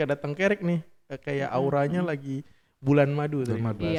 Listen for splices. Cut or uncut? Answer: uncut